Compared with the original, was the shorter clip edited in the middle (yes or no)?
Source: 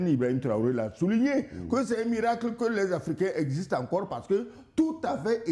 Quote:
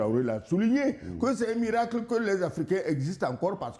no